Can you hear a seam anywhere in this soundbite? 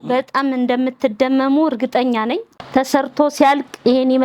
yes; 1 cut; at 2.8 s

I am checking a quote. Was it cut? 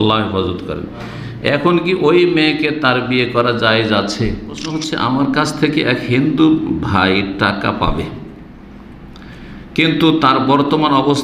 yes; 1 cut; at 4.9 s

